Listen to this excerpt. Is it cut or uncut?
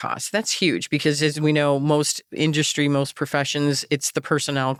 uncut